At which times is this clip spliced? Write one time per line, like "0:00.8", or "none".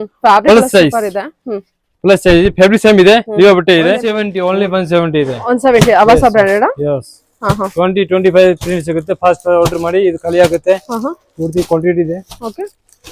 0:04.2